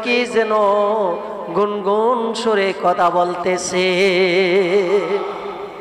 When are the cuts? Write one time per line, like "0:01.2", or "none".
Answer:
none